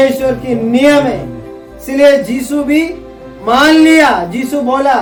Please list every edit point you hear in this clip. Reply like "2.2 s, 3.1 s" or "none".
none